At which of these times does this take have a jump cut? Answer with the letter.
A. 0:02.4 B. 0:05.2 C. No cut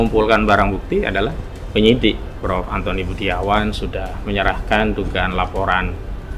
A